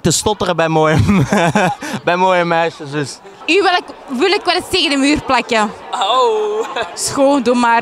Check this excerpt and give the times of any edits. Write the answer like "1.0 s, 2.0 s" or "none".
3.3 s, 6.8 s